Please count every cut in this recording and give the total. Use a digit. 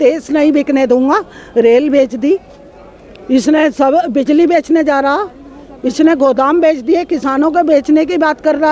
0